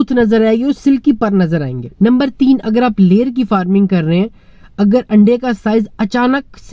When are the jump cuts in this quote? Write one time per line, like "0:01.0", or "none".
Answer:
0:01.8